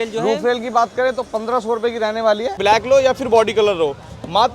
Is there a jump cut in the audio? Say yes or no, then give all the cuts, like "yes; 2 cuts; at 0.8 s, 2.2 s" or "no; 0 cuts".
yes; 1 cut; at 2.6 s